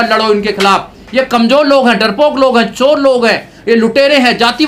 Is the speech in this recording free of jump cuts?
yes; 0 cuts

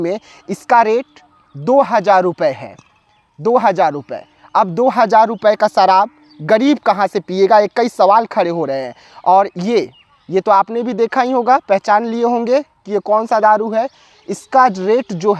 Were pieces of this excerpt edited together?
no; 0 cuts

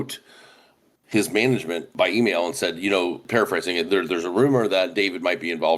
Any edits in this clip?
no; 0 cuts

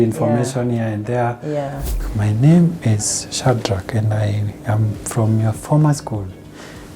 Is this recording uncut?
no; 1 cut; at 1.9 s

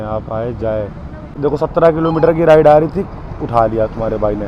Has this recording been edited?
yes; 1 cut; at 1.3 s

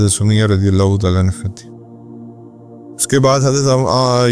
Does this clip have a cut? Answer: no; 0 cuts

